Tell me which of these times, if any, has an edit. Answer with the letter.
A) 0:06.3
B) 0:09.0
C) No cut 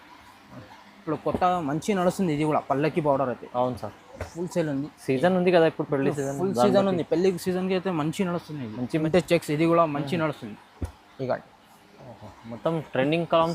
B